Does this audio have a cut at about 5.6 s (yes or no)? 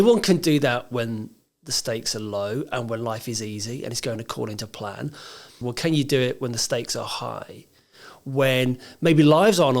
yes